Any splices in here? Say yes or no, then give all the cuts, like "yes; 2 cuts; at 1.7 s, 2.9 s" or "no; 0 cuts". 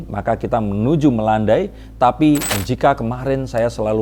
yes; 1 cut; at 2.5 s